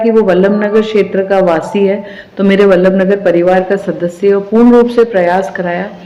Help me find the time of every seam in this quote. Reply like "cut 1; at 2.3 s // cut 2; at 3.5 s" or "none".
none